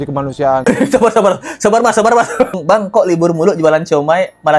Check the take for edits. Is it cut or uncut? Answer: cut